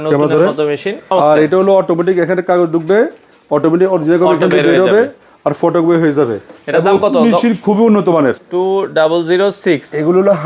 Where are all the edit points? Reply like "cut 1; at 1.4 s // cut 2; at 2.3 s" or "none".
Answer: cut 1; at 1.0 s // cut 2; at 8.4 s